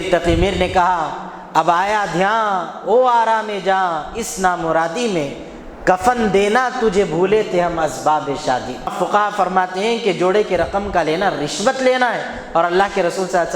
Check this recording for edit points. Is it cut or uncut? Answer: cut